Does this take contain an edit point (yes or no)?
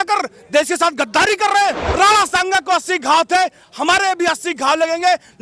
yes